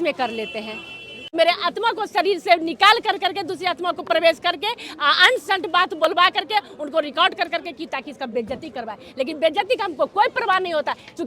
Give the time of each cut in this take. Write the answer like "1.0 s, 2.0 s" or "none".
1.2 s

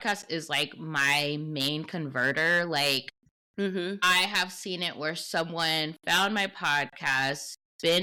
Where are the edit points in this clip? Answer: none

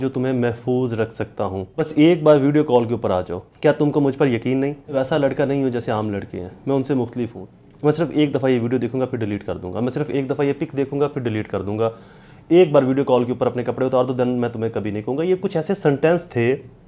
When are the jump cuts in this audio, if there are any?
1.9 s, 3.4 s, 4.9 s, 7.4 s

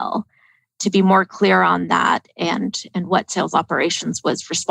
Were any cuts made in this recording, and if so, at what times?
none

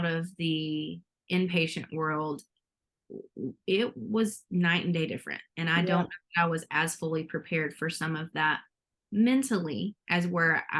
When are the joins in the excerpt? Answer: none

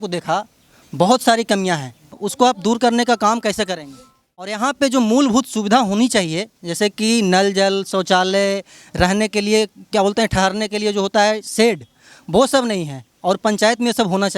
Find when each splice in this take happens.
2.2 s, 4.5 s

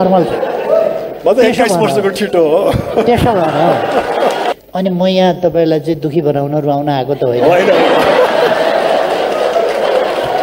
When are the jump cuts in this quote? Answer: 4.5 s

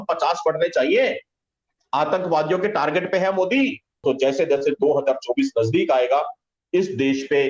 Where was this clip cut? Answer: 4.0 s

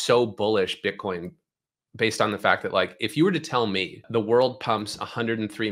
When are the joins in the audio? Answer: 4.0 s

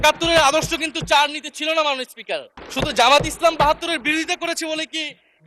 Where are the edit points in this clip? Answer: 2.6 s

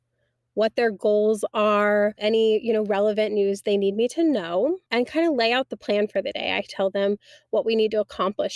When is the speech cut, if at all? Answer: 2.2 s, 4.8 s

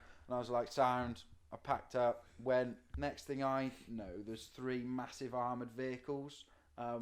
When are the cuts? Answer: 2.8 s

